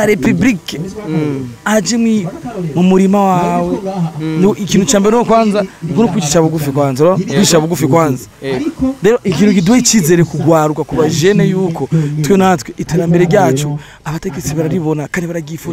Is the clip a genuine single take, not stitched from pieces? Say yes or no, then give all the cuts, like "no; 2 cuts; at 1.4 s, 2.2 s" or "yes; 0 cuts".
yes; 0 cuts